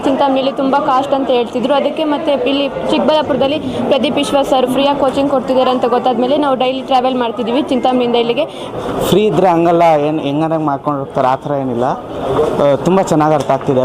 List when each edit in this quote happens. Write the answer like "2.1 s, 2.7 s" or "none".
8.6 s